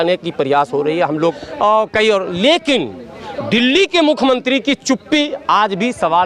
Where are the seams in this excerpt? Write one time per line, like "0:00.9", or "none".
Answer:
0:01.4